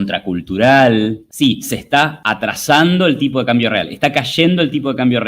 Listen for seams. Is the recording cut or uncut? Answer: cut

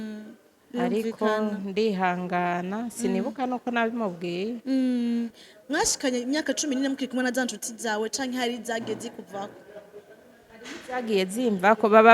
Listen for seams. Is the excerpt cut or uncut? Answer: cut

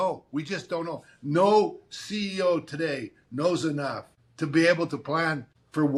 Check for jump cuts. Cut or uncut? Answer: uncut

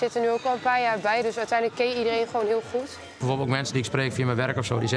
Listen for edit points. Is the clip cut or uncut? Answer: cut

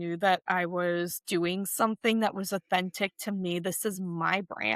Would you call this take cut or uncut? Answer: uncut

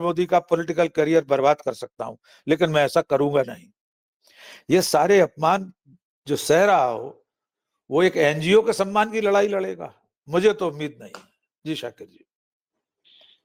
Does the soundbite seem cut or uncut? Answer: uncut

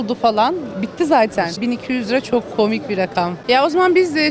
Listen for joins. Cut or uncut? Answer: cut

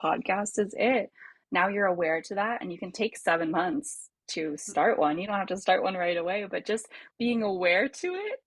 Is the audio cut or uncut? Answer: uncut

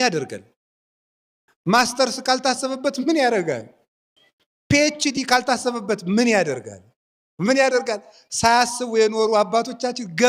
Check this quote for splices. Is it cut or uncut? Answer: uncut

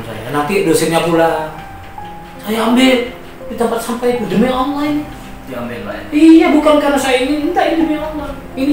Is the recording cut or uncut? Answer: uncut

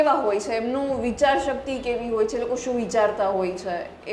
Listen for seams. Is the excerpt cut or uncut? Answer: uncut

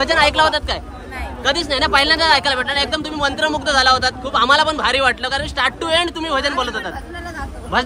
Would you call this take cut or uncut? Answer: uncut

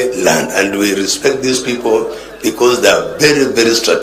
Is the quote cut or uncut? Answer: uncut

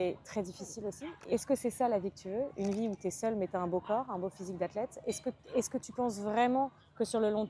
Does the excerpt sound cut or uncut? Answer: cut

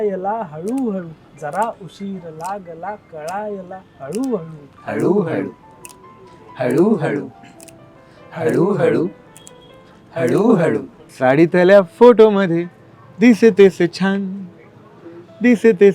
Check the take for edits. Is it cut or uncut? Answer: cut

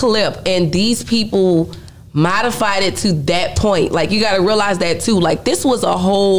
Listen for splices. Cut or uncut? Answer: uncut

